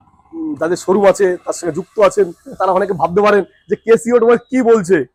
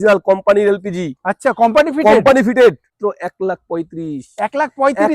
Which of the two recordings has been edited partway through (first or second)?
second